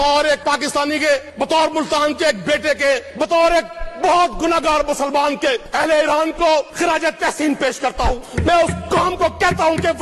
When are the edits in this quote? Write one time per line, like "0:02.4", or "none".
0:01.3
0:03.1
0:05.7
0:06.7
0:08.3